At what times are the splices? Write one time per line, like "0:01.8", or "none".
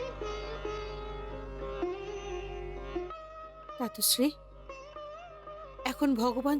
0:03.1